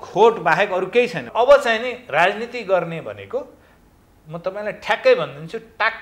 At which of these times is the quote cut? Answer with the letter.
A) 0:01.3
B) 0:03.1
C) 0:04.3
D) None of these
A